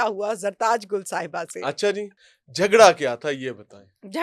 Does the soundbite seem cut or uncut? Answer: cut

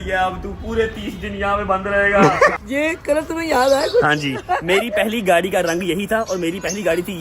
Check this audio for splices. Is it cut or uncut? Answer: cut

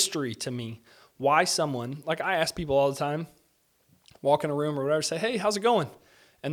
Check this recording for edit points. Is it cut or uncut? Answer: uncut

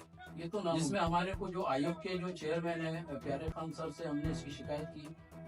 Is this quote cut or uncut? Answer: cut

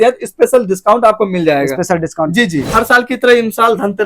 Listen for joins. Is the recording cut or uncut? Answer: cut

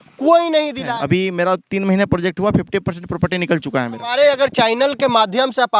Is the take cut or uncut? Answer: cut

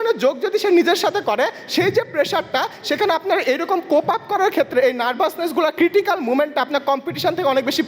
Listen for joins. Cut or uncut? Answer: cut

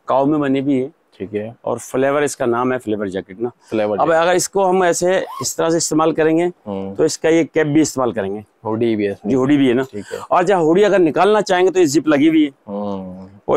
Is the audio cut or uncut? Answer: uncut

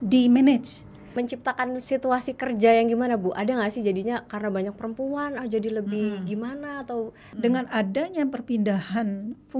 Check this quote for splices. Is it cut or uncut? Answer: cut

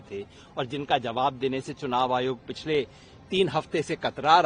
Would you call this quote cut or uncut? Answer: uncut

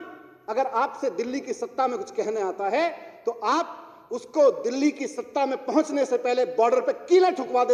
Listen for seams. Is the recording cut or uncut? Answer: uncut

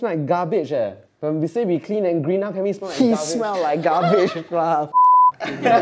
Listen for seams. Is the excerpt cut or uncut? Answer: cut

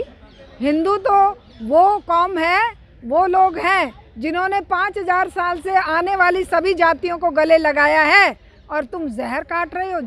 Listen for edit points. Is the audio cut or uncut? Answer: uncut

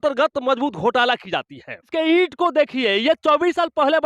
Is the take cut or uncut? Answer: cut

